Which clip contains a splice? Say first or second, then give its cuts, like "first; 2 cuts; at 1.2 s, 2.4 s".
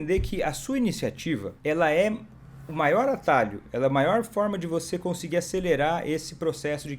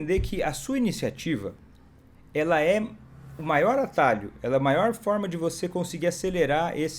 first; 1 cut; at 1.5 s